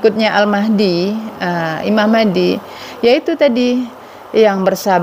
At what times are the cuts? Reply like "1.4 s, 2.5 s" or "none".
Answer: none

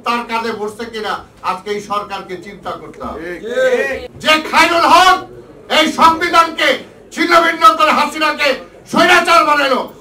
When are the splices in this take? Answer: 4.1 s

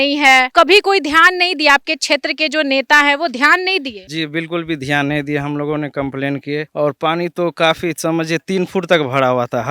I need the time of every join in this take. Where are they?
none

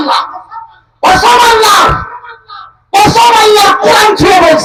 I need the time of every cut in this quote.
none

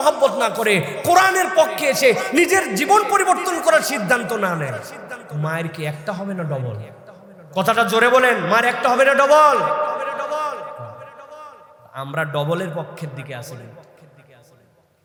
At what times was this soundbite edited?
none

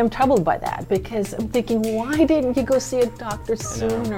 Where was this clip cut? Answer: none

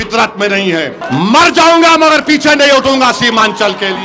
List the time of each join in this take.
1.0 s

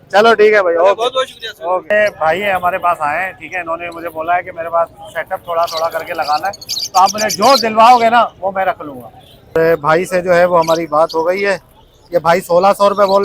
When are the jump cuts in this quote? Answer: 1.9 s, 9.5 s

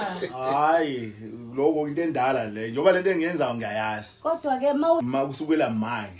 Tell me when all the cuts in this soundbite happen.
5.0 s

